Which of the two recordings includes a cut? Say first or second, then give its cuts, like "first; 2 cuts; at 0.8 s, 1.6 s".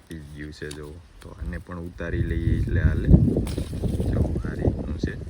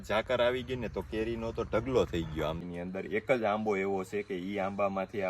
second; 1 cut; at 2.6 s